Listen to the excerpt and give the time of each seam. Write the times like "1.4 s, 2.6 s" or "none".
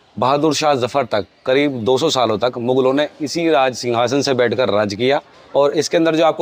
none